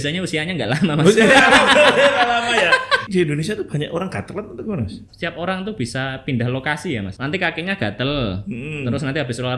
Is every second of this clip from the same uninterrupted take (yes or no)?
no